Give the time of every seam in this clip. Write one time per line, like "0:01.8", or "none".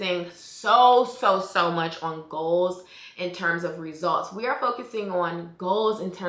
none